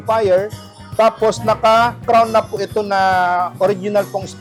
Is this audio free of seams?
yes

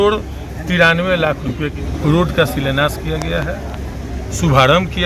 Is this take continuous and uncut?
no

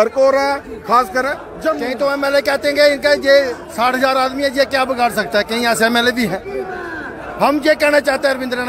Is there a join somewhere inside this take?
yes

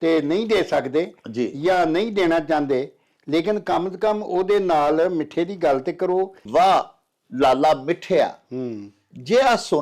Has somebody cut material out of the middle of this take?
yes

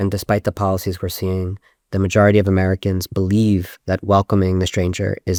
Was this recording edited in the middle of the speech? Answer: no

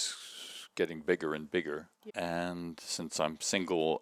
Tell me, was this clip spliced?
no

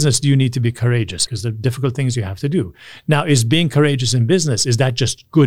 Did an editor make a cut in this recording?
yes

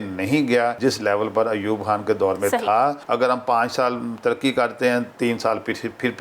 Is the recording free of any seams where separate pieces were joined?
no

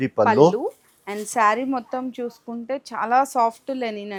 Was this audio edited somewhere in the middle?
no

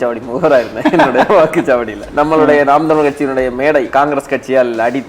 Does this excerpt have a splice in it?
yes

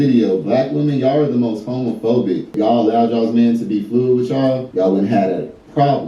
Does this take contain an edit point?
yes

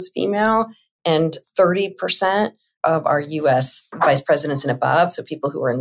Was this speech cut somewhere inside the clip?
no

